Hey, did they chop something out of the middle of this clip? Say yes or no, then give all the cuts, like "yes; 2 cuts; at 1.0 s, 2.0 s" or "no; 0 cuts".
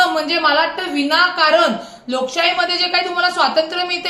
no; 0 cuts